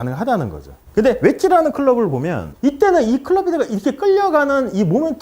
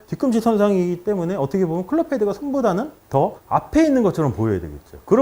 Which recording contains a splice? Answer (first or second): first